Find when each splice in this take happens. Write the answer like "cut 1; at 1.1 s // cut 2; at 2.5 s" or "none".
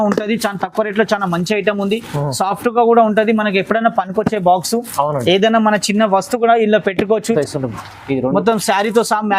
cut 1; at 7.4 s